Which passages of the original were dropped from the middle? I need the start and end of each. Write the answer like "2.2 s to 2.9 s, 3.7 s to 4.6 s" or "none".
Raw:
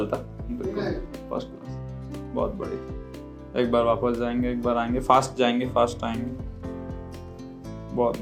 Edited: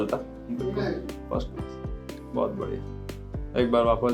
none